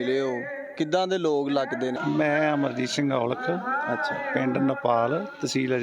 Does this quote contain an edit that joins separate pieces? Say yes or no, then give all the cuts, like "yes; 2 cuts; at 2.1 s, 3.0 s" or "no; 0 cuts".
yes; 1 cut; at 2.0 s